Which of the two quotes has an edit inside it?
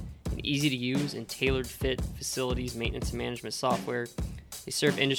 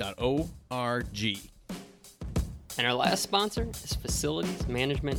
second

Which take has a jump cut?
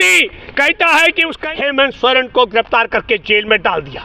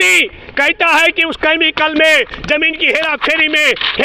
first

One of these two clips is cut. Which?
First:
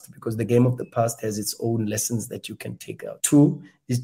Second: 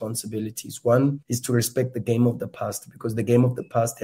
first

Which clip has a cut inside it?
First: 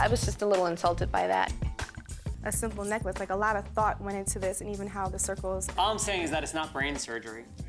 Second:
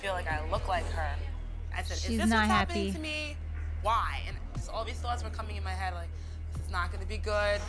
first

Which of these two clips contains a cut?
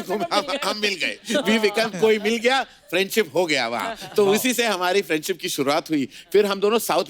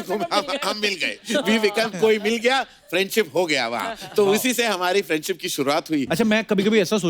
second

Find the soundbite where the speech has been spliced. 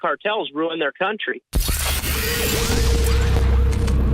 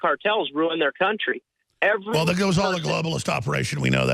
first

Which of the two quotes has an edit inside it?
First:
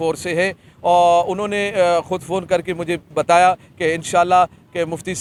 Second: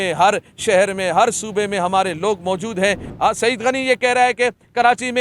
second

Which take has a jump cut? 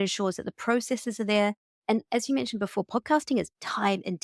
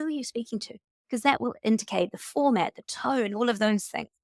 second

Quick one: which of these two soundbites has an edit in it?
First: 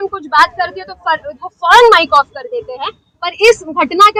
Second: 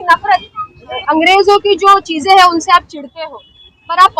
second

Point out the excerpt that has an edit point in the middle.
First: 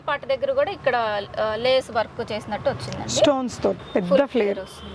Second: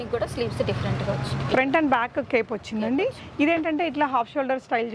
first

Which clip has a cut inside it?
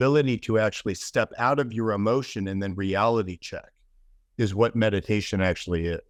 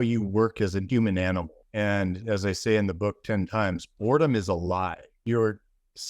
second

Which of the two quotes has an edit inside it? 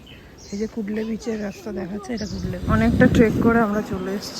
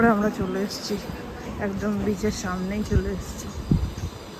first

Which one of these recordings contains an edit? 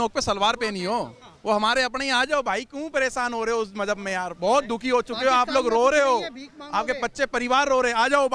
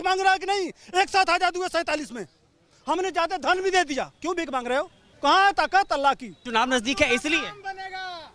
second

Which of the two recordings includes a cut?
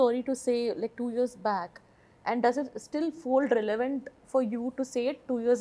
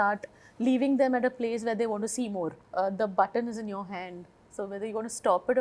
second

